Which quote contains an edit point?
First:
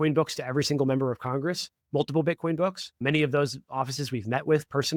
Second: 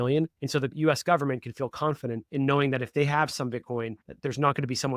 second; 1 cut; at 4.0 s

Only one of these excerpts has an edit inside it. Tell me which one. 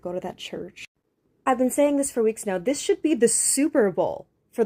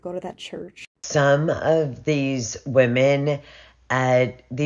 second; 1 cut; at 1.0 s

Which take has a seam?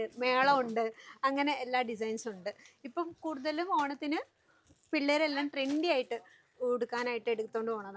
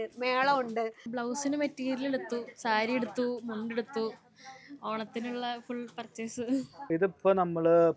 second; 2 cuts; at 1.1 s, 6.8 s

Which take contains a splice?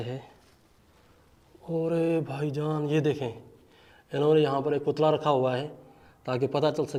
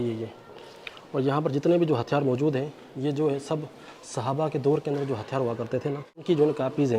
second; 1 cut; at 6.1 s

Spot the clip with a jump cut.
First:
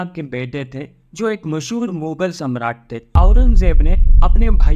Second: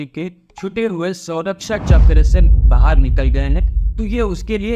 first; 1 cut; at 3.1 s

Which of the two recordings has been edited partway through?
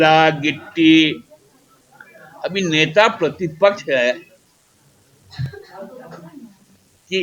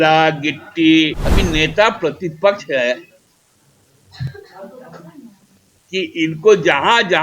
second; 1 cut; at 1.2 s

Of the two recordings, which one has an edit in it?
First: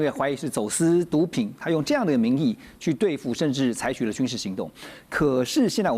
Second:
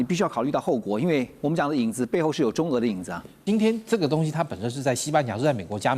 second; 1 cut; at 3.4 s

